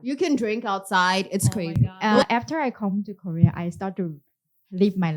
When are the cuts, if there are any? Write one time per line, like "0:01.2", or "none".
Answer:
0:01.7